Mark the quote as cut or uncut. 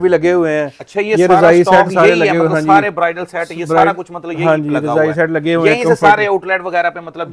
uncut